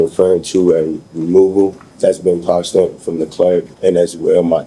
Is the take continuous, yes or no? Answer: no